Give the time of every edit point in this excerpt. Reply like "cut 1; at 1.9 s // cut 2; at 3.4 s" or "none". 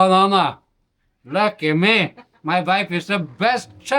none